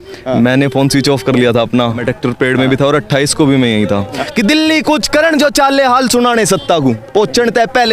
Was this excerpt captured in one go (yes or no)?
no